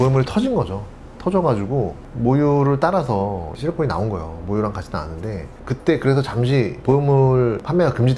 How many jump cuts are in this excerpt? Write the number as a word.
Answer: one